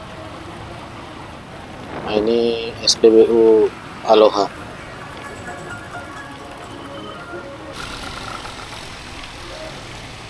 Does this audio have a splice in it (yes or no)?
yes